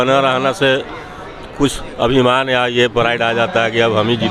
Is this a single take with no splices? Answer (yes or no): yes